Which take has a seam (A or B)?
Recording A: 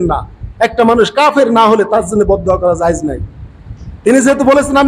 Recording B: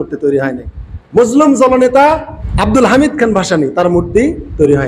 B